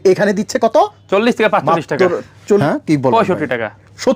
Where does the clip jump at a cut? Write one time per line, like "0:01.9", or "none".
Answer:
0:02.6